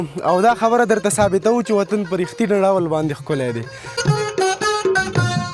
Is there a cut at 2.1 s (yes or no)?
no